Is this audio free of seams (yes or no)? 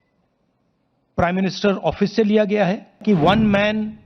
no